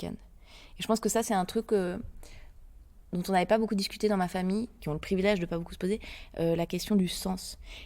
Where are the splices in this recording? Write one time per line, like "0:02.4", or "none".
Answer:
0:04.8